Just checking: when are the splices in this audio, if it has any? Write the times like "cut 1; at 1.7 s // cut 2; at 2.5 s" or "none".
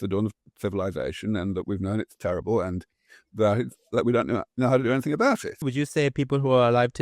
cut 1; at 5.6 s